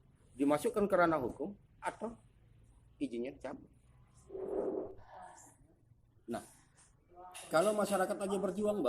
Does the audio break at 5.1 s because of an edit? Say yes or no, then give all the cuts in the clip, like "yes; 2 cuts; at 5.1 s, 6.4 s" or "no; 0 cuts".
yes; 1 cut; at 5.1 s